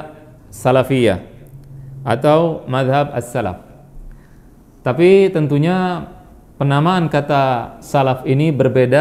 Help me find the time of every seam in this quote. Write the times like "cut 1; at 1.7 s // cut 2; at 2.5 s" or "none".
none

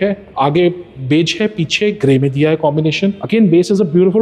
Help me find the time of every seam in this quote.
cut 1; at 3.2 s

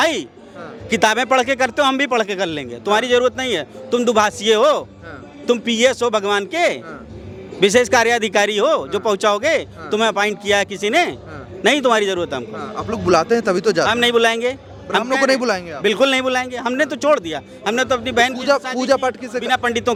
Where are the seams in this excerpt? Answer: none

